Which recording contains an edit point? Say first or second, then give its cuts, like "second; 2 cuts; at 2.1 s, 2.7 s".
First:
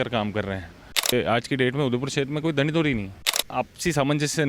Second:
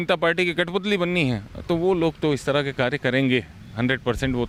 first; 2 cuts; at 1.1 s, 3.4 s